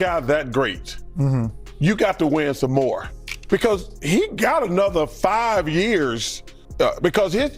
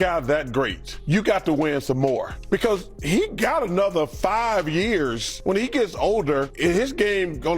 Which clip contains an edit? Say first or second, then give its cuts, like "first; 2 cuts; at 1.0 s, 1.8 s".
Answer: second; 4 cuts; at 0.9 s, 2.3 s, 5.3 s, 6.5 s